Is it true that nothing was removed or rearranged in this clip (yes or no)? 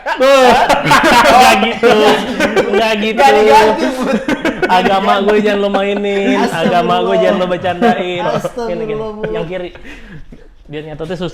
yes